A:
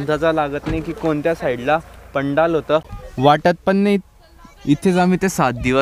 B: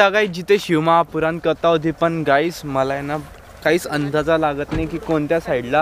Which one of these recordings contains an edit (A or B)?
A